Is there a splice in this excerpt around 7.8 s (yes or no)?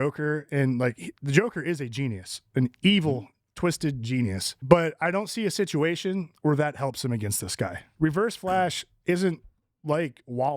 yes